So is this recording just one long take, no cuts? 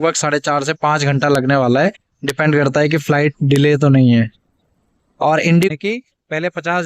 no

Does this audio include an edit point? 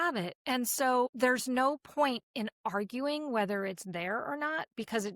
yes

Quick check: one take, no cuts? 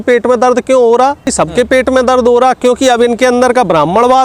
no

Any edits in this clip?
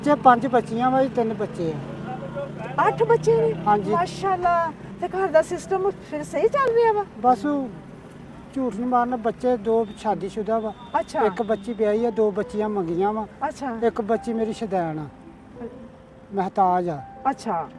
yes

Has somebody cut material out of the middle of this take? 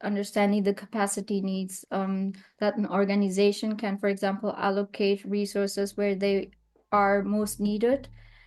no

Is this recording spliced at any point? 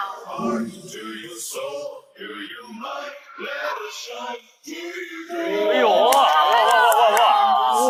no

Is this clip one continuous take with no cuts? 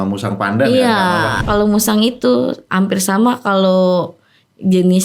no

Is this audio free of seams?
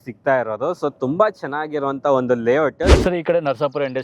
no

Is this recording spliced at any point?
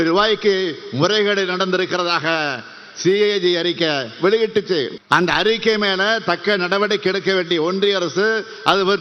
yes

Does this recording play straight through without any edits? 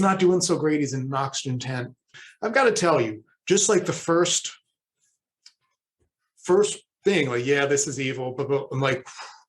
no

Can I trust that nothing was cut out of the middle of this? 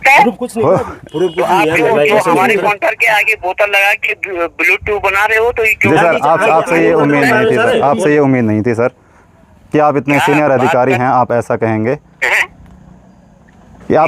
yes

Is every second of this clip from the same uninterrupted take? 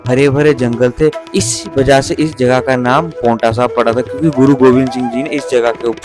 no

